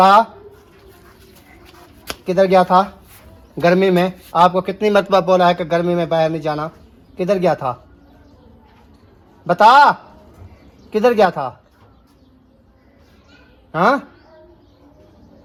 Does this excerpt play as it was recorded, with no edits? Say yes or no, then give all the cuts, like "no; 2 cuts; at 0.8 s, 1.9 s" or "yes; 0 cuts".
yes; 0 cuts